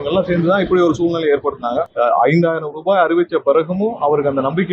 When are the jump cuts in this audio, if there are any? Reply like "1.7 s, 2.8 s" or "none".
1.9 s